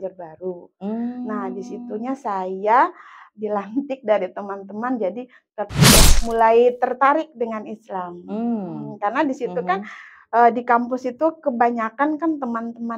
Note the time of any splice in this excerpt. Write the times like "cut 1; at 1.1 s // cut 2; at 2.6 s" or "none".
cut 1; at 5.8 s